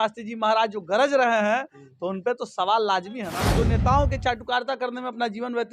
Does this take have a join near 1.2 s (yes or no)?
no